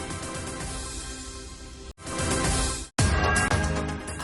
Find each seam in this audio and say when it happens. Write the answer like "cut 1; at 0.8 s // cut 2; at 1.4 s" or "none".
cut 1; at 1.8 s